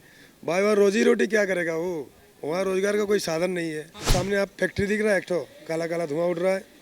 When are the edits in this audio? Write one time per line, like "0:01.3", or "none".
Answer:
0:03.9